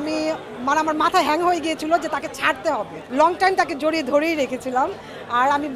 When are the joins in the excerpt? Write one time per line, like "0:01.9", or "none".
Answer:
0:03.0

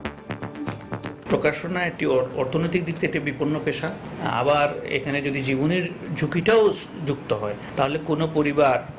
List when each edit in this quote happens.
0:01.2

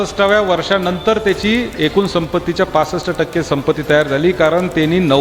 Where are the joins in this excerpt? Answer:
none

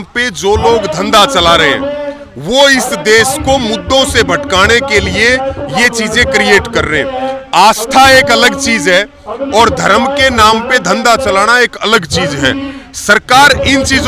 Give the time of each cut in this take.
none

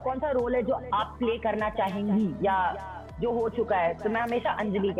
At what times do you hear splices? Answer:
none

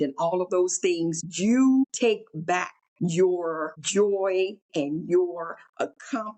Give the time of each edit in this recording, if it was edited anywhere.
0:01.2
0:02.4
0:03.7
0:04.6

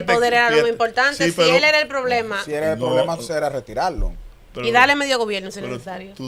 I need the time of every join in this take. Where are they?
none

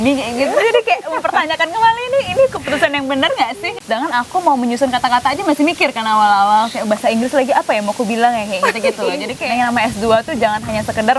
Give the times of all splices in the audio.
0:03.7
0:09.3

